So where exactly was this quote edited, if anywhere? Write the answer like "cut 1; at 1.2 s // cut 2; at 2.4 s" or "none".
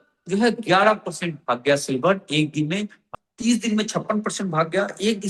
cut 1; at 3.0 s